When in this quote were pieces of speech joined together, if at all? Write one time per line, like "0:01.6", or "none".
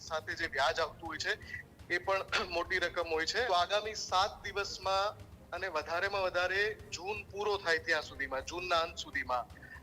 0:03.5